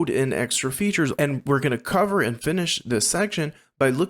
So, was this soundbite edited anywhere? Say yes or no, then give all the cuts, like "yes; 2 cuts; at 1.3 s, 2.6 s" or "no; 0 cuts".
yes; 1 cut; at 1.3 s